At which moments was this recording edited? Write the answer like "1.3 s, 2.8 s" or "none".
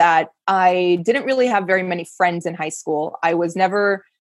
none